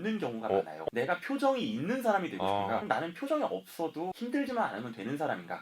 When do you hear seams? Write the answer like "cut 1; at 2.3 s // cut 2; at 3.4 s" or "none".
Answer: cut 1; at 0.8 s // cut 2; at 2.8 s // cut 3; at 4.1 s